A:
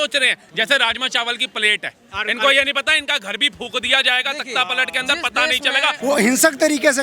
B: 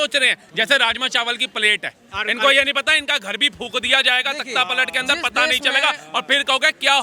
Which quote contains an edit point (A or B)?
A